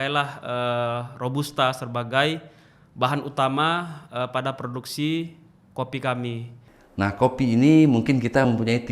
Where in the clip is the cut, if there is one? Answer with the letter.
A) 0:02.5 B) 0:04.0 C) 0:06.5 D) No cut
C